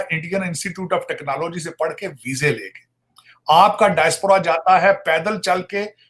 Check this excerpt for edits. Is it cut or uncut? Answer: uncut